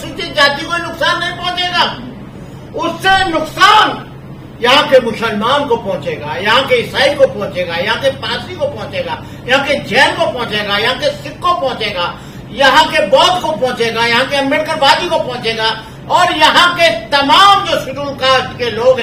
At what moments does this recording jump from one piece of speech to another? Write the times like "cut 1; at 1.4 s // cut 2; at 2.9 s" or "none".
none